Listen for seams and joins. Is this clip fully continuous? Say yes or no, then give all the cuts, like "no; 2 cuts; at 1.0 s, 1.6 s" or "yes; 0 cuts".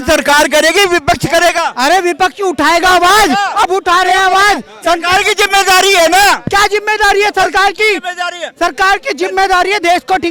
yes; 0 cuts